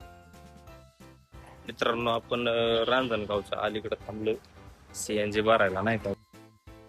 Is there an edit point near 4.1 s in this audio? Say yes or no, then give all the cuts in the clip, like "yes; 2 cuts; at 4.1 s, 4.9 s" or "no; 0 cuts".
no; 2 cuts; at 1.6 s, 6.1 s